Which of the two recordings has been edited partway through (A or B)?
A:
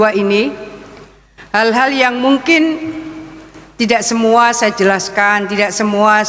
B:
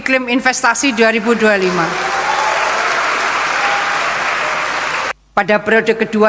B